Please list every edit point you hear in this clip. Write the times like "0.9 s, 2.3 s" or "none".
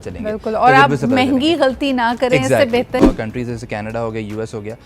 3.0 s